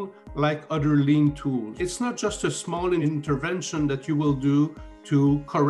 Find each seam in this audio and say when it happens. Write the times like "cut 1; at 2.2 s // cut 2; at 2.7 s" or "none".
cut 1; at 1.7 s // cut 2; at 3.0 s